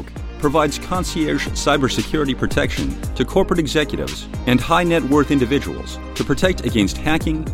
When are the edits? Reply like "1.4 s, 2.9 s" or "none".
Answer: none